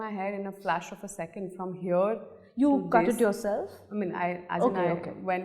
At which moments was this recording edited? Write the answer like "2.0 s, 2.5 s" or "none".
none